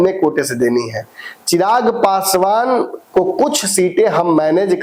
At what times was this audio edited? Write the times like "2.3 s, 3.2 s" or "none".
none